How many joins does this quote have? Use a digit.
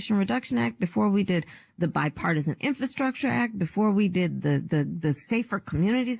1